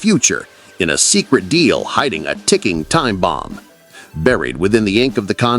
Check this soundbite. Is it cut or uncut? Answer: uncut